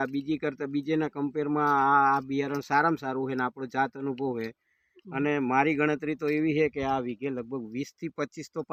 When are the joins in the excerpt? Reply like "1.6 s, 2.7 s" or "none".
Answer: none